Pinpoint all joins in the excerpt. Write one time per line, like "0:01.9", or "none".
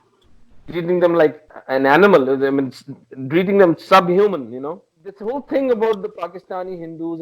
0:01.5
0:05.2